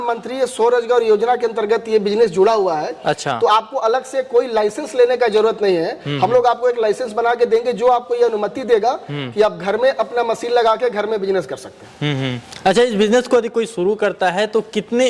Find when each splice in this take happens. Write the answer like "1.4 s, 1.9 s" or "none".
none